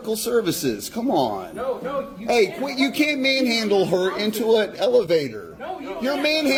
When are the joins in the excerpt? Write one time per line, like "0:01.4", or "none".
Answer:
none